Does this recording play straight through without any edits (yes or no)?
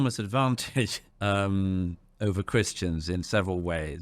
no